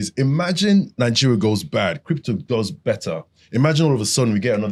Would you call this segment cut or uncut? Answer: uncut